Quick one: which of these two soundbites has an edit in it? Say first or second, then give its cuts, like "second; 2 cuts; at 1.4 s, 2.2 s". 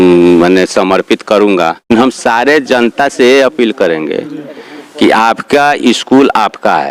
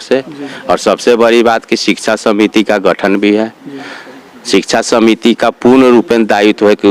first; 1 cut; at 1.9 s